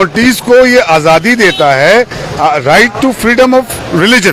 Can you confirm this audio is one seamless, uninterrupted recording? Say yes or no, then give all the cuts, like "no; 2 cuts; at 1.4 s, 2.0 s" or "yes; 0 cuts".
yes; 0 cuts